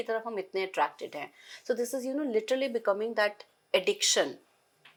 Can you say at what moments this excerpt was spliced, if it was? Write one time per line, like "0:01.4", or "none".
none